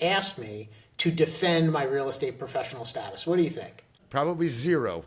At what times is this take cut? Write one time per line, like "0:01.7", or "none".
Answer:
0:04.0